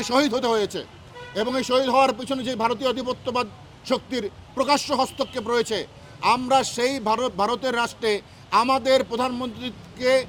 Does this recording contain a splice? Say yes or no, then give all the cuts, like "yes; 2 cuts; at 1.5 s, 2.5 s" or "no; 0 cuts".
no; 0 cuts